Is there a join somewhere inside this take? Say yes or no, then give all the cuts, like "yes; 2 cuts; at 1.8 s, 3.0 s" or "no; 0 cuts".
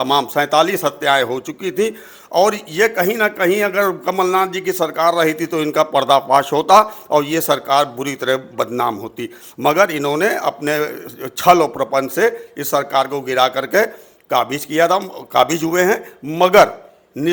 no; 0 cuts